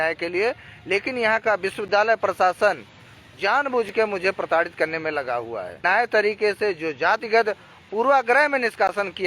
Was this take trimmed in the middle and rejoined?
yes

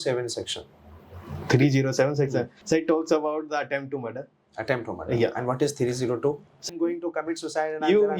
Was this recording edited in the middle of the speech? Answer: yes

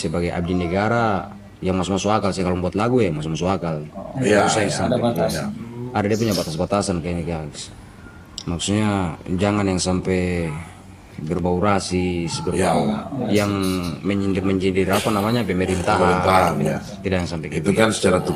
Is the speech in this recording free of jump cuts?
yes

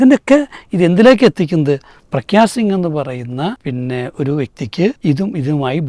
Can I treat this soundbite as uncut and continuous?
no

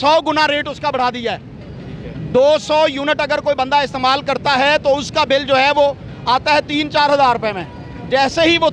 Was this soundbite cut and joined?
no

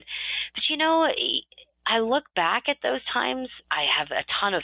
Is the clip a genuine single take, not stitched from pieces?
no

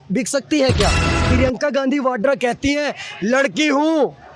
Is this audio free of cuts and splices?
no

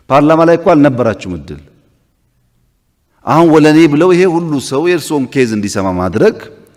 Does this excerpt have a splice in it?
no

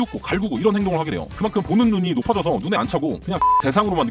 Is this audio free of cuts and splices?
no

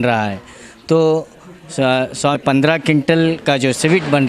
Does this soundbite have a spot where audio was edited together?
yes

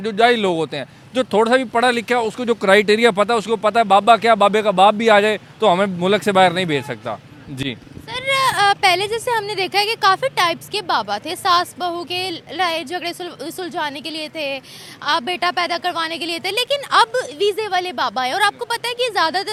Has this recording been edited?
no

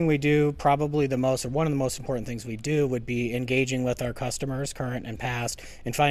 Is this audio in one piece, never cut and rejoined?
yes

